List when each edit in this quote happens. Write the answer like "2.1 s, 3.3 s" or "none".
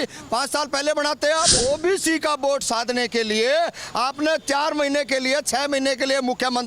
1.5 s